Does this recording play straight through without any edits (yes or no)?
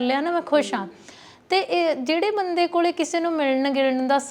yes